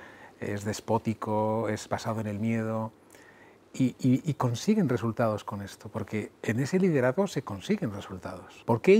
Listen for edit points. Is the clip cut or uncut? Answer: uncut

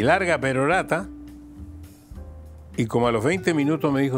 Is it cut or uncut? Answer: uncut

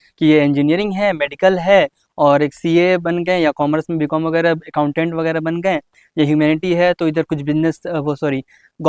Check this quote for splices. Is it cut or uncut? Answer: uncut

